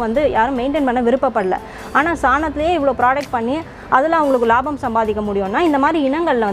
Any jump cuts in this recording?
no; 0 cuts

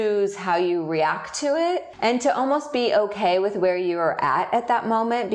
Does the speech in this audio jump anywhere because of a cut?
yes; 1 cut; at 1.9 s

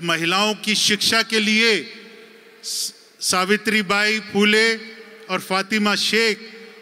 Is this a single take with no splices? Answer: yes; 0 cuts

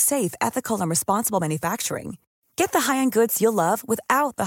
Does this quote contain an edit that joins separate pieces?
no; 0 cuts

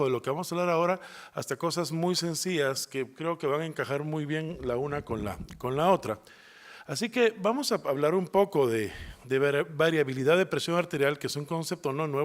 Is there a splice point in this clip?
yes; 1 cut; at 3.4 s

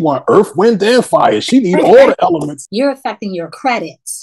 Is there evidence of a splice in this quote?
yes; 1 cut; at 2.6 s

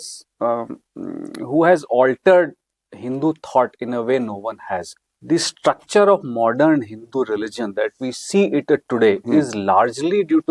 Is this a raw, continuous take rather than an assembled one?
no; 1 cut; at 4.9 s

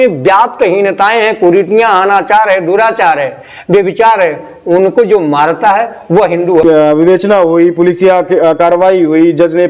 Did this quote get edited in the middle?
yes; 1 cut; at 6.6 s

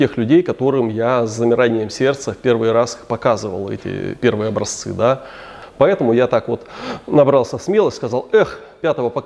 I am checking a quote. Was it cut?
yes; 1 cut; at 5.6 s

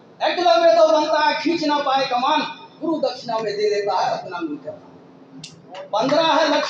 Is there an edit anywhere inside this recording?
no; 0 cuts

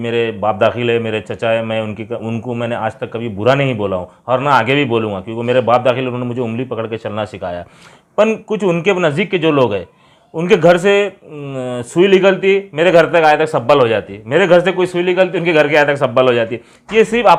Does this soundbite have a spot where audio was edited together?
no; 0 cuts

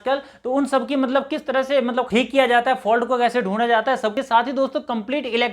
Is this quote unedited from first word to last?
no; 2 cuts; at 2.1 s, 4.1 s

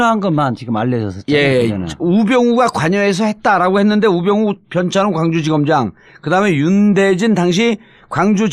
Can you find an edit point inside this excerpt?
yes; 1 cut; at 4.2 s

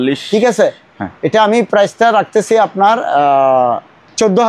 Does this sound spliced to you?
no; 0 cuts

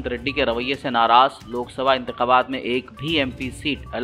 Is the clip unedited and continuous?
yes; 0 cuts

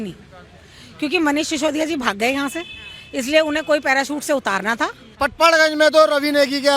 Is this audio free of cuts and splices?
no; 1 cut; at 5.2 s

